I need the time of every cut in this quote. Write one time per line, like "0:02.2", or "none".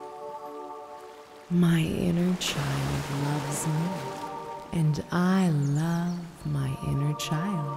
0:01.1